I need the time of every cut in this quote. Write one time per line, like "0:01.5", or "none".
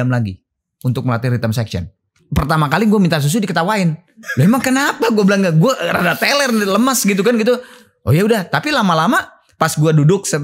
0:02.2
0:04.2